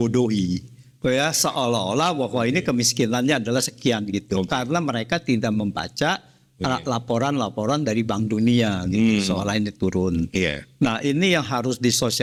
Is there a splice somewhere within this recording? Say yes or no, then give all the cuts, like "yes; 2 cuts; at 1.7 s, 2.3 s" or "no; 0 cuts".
no; 0 cuts